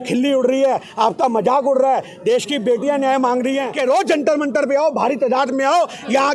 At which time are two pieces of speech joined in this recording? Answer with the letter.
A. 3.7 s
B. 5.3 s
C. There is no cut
A